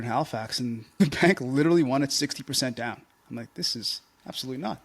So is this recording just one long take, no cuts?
no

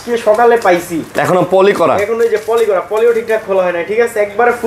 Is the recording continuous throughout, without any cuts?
yes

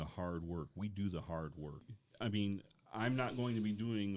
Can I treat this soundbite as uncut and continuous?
no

